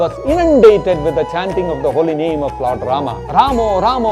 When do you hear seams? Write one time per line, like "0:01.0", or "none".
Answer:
0:03.2